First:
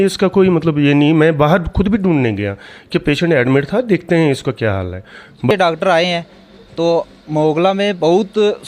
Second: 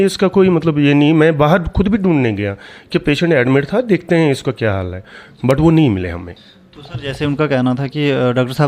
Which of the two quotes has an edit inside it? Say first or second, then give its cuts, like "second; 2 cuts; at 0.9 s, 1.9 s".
first; 1 cut; at 5.5 s